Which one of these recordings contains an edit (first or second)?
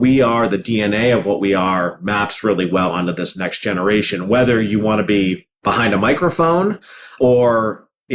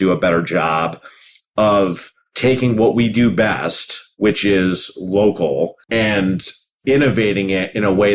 second